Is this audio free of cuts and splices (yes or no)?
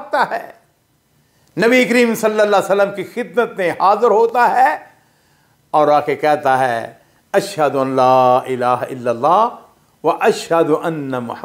yes